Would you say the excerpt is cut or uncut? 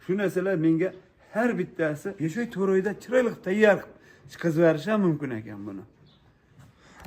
cut